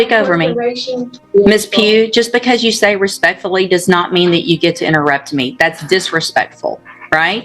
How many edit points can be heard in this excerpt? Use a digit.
1